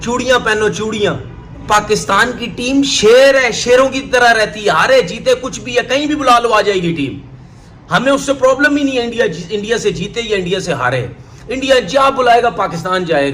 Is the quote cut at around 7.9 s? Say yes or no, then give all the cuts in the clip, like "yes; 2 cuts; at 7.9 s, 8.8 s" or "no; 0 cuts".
no; 1 cut; at 1.6 s